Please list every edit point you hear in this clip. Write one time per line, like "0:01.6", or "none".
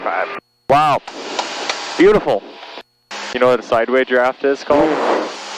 0:03.0